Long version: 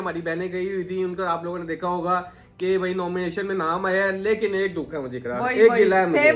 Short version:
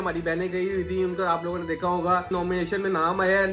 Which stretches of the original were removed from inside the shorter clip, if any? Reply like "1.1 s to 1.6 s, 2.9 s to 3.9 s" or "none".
2.3 s to 3.0 s